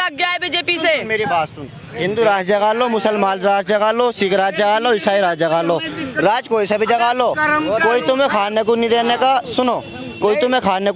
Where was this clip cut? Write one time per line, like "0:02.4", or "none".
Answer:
none